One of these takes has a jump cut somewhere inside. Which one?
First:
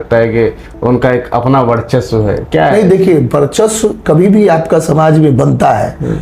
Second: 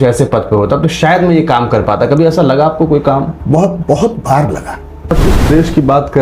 second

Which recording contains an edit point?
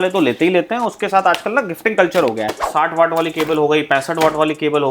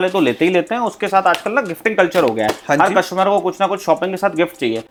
first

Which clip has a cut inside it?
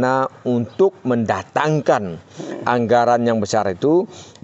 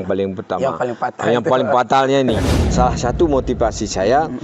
second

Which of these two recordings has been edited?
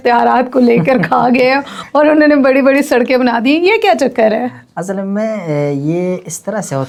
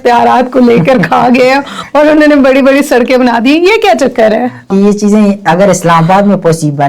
second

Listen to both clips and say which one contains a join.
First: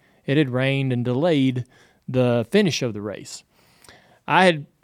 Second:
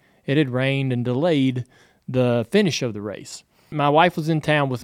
second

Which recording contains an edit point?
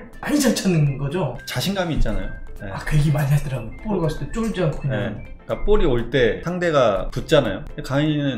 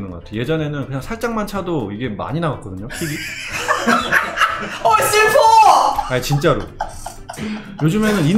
first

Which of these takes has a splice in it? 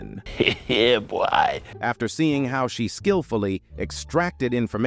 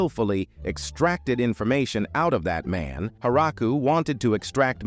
first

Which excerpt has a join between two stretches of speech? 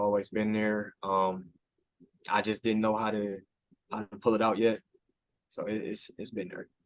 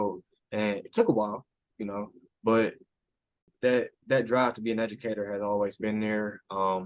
second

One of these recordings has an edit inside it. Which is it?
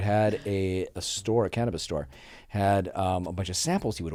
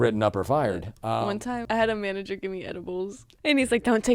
second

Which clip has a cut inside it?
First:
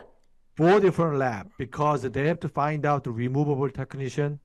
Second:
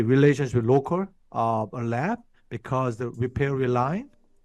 second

